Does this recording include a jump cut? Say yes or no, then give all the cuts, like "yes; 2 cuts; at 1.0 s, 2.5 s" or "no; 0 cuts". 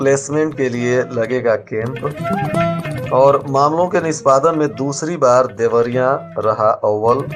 no; 0 cuts